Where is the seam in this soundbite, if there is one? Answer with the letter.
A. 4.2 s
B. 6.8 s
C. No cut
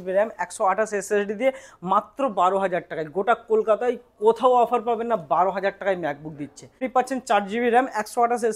B